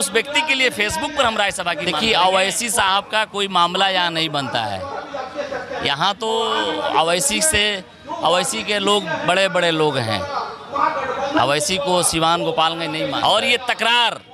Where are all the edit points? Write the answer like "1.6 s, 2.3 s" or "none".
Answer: 1.9 s, 12.9 s